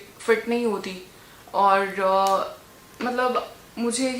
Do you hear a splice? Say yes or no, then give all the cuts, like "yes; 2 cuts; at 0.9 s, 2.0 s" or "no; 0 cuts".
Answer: no; 0 cuts